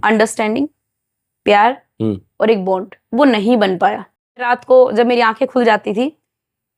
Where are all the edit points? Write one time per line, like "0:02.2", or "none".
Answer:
0:04.3